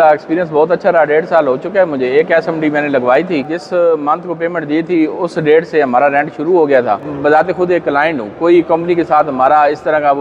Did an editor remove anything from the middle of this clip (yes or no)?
yes